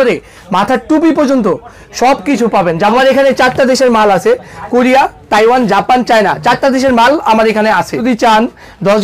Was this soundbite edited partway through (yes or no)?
yes